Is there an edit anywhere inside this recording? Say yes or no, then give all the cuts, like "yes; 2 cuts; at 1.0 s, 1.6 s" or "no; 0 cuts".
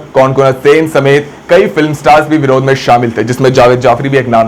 no; 0 cuts